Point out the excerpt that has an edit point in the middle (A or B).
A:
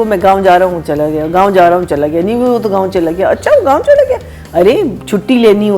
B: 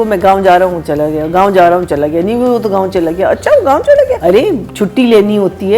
B